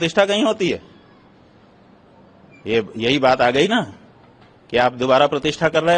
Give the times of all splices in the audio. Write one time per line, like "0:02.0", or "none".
none